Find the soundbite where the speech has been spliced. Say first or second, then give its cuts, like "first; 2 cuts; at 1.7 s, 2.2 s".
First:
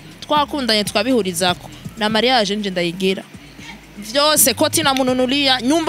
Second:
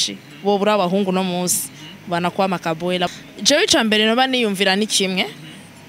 second; 1 cut; at 3.1 s